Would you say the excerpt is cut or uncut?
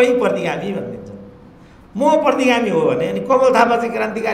uncut